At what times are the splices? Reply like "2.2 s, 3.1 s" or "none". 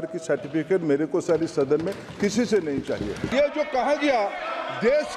3.2 s